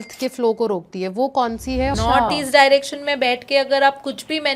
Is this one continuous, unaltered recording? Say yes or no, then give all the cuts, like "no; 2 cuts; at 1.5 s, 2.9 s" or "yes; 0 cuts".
no; 1 cut; at 1.9 s